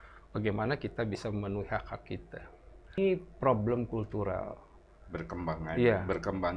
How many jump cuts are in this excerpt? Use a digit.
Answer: 1